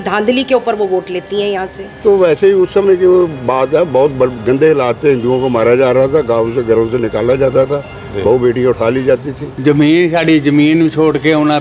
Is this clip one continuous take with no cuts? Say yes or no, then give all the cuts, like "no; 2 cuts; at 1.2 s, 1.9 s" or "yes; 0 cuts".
no; 2 cuts; at 2.0 s, 9.5 s